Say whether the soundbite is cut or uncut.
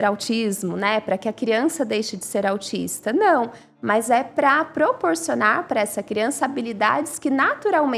uncut